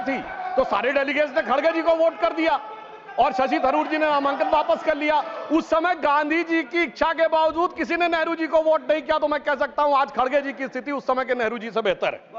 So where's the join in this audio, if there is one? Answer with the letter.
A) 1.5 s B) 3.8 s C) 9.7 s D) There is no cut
D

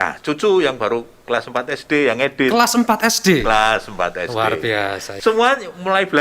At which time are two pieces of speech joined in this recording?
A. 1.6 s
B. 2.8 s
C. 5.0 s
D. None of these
C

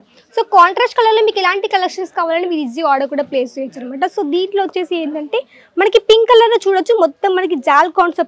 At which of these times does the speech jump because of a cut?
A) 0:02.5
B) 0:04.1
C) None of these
C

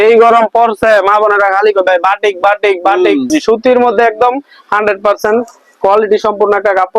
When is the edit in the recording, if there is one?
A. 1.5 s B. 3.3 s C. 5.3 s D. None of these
B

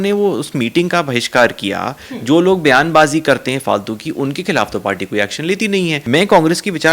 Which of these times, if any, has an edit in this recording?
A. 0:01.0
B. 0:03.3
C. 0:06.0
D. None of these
C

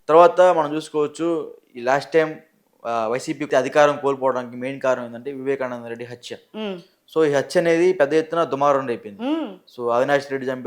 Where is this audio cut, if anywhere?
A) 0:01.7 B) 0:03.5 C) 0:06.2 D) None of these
B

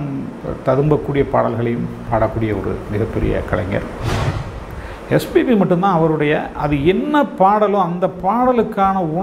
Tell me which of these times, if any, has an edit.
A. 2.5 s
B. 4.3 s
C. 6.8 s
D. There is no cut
B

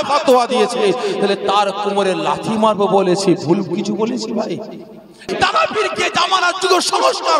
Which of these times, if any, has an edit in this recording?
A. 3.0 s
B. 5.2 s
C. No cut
B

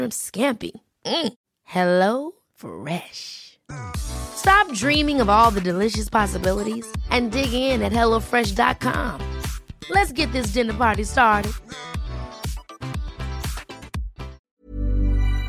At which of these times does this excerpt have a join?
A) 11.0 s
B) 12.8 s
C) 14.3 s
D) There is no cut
C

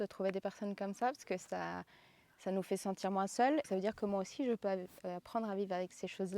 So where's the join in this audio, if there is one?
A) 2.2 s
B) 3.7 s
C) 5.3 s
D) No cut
B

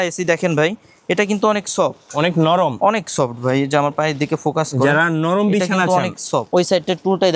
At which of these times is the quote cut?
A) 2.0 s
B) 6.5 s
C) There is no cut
B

